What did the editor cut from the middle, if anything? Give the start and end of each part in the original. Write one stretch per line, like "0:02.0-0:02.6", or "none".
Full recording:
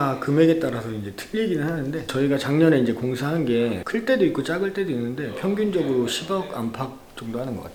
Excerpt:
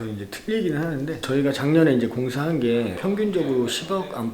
0:03.8-0:05.4